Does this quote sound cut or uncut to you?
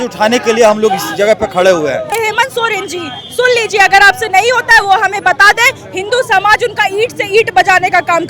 cut